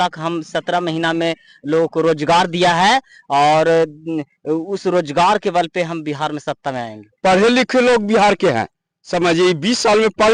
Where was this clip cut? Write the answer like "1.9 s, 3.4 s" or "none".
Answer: none